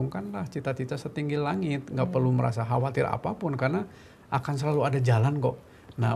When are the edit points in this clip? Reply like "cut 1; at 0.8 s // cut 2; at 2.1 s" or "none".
none